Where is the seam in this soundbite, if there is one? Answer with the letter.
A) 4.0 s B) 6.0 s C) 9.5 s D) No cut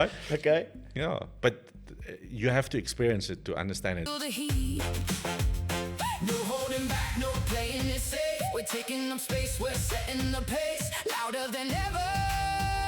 A